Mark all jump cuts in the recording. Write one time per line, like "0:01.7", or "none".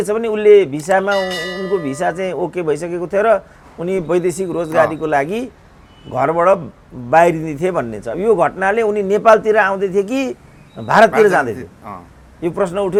none